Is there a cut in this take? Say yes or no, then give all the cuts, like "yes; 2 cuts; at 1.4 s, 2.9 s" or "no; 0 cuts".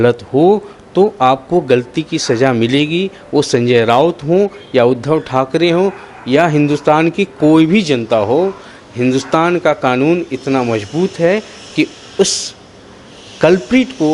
no; 0 cuts